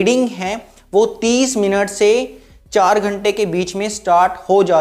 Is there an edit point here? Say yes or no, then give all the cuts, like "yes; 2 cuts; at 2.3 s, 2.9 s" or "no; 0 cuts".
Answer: no; 0 cuts